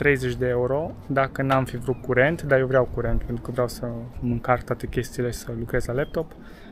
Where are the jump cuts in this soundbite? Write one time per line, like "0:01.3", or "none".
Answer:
none